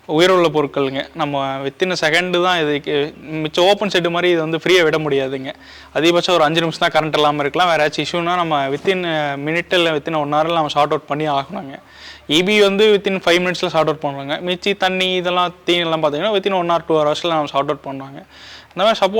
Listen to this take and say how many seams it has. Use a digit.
0